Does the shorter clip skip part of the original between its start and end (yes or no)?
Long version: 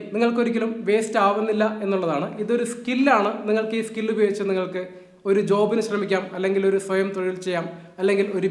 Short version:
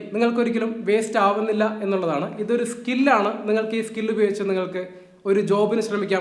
no